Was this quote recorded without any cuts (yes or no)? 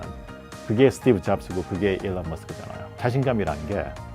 no